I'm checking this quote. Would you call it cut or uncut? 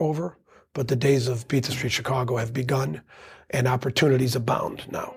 uncut